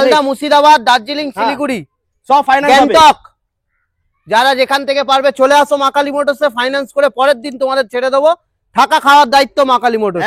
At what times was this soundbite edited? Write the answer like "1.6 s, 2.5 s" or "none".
none